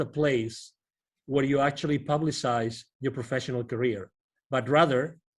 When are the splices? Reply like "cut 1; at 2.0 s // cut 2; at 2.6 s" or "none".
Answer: none